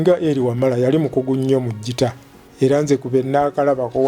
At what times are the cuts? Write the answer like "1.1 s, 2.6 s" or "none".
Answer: 2.5 s